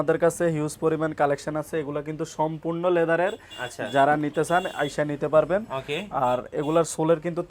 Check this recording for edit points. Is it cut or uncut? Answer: uncut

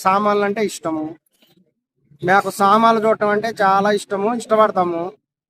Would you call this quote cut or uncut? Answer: uncut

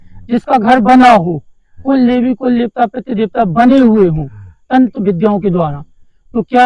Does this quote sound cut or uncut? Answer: uncut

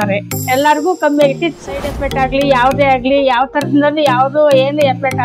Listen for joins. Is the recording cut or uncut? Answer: cut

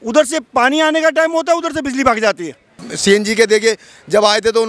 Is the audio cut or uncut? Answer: cut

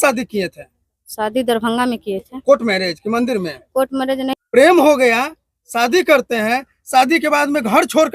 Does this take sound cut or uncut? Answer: cut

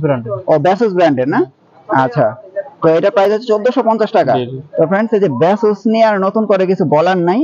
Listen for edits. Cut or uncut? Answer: uncut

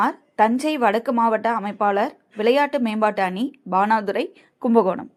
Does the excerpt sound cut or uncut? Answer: uncut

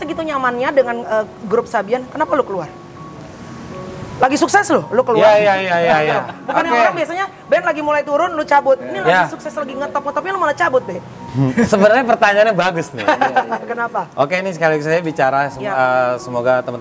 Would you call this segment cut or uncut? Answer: uncut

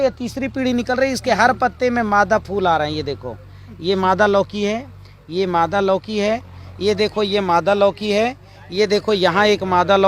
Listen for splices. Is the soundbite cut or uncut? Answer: uncut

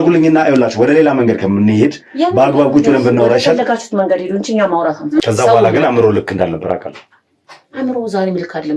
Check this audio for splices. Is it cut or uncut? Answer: cut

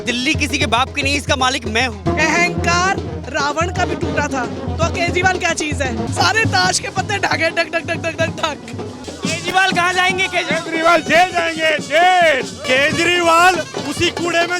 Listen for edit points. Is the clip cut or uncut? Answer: cut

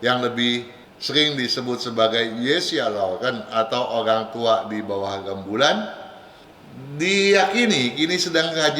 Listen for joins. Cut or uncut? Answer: uncut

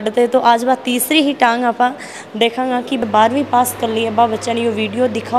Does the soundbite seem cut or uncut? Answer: cut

